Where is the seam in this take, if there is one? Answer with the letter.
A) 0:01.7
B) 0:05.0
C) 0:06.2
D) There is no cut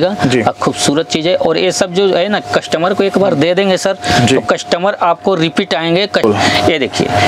C